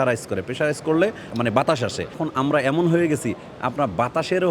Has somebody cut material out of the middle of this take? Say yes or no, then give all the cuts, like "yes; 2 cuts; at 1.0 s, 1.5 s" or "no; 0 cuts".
no; 0 cuts